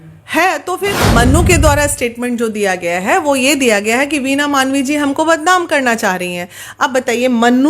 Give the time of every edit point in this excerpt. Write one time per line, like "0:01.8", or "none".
0:01.0